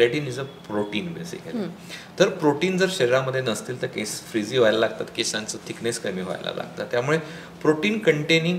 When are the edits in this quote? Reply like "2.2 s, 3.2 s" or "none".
none